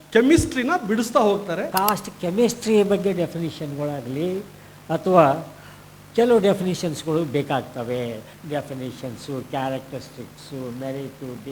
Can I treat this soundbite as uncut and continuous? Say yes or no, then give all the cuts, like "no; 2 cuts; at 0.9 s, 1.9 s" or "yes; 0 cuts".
no; 1 cut; at 1.7 s